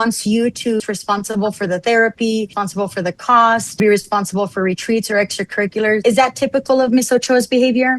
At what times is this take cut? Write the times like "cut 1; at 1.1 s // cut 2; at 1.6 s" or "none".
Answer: cut 1; at 0.8 s // cut 2; at 2.6 s // cut 3; at 3.8 s // cut 4; at 6.0 s